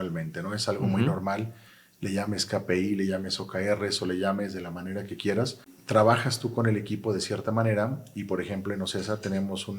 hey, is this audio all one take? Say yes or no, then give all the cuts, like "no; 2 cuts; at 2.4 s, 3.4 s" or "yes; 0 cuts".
no; 1 cut; at 5.7 s